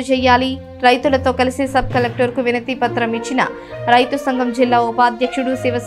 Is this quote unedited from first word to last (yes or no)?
yes